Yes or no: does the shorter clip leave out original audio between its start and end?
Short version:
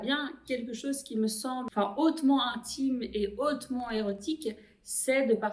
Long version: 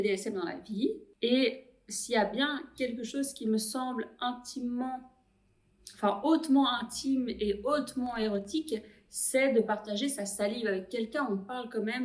yes